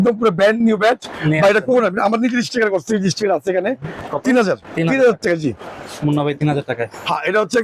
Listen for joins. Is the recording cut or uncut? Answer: cut